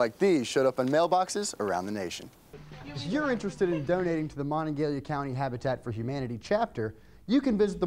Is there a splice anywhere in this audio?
yes; 1 cut; at 2.6 s

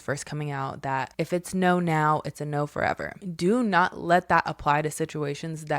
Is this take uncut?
no; 1 cut; at 1.1 s

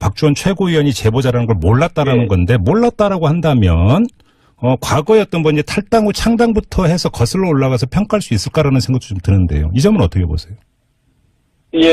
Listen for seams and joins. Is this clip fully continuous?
no; 1 cut; at 8.3 s

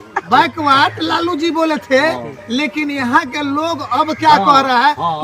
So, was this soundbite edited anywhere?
no; 0 cuts

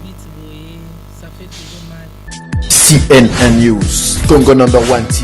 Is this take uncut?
no; 1 cut; at 2.2 s

